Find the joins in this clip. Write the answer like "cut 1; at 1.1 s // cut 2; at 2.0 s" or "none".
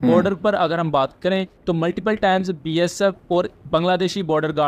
none